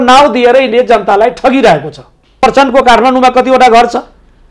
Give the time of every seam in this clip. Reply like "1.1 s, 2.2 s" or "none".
2.4 s